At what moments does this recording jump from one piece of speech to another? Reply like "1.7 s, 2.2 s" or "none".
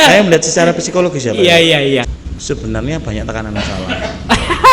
2.1 s